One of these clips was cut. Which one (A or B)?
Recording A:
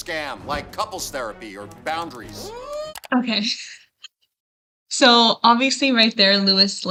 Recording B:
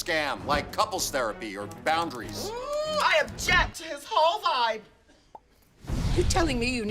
B